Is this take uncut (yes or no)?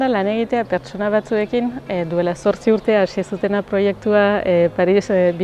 yes